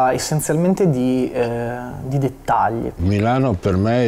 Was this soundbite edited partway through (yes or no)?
yes